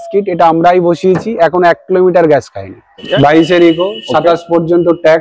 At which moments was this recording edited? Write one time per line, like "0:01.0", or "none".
0:03.0